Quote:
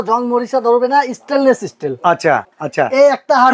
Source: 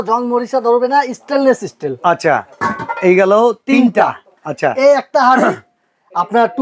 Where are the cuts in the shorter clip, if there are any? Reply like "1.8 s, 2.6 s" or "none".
2.6 s